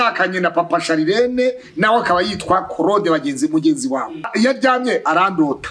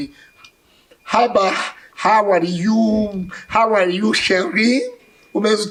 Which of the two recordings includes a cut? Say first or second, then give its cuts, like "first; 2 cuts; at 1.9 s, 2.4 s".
first; 1 cut; at 4.3 s